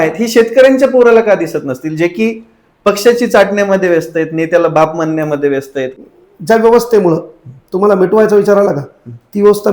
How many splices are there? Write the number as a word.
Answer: one